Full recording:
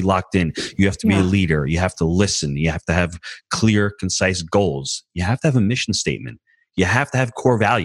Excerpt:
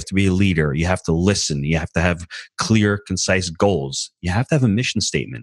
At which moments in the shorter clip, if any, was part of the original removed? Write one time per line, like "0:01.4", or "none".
none